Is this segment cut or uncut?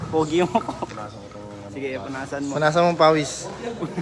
uncut